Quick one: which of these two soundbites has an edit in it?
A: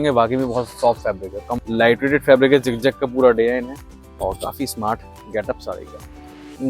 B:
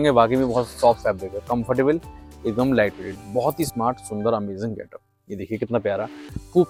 A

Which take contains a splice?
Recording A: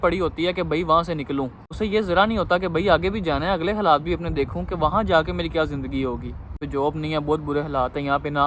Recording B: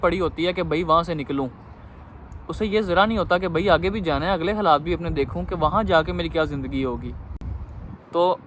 A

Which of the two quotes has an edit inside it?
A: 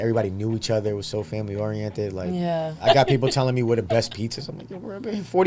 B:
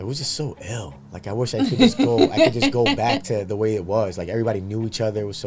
A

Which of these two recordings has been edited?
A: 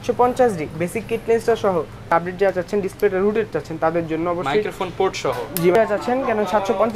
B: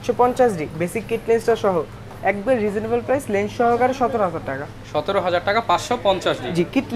A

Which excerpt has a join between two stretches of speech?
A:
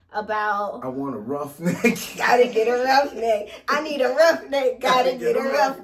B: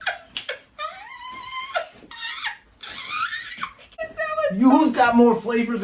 B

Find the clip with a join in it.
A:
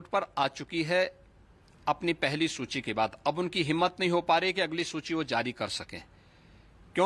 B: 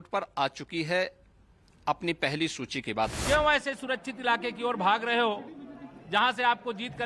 B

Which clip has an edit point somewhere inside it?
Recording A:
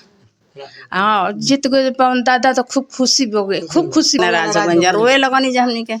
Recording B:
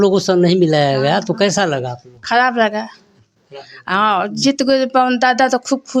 A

